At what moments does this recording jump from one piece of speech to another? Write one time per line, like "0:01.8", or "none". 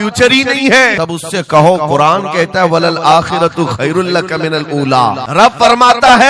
0:01.0
0:05.2